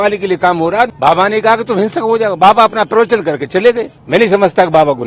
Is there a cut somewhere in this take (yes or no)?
yes